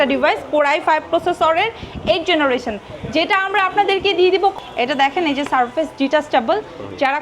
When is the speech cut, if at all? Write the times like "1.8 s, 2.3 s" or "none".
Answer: 4.5 s